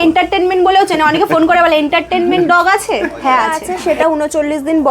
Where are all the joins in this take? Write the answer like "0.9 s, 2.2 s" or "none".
3.7 s